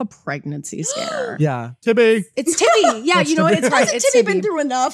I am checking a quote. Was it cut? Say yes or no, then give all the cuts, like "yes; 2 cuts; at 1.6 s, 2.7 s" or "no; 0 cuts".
no; 0 cuts